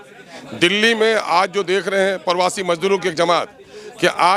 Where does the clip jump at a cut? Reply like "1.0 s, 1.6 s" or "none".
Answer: none